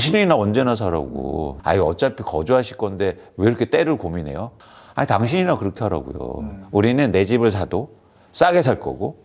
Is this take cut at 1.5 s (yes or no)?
yes